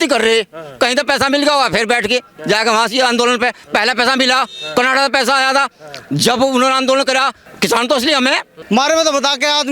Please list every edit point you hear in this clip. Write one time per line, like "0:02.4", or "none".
0:07.4
0:08.5